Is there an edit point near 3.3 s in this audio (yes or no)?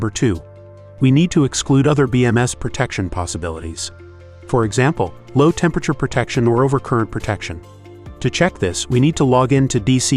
no